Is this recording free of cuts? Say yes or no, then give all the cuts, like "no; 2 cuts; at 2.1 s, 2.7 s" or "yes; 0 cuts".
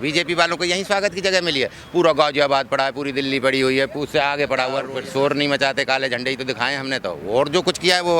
no; 1 cut; at 4.8 s